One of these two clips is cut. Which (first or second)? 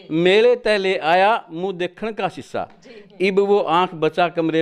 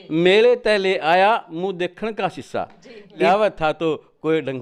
second